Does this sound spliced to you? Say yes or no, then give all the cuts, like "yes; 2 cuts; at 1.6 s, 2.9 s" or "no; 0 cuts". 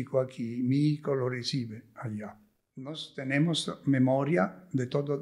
yes; 1 cut; at 3.0 s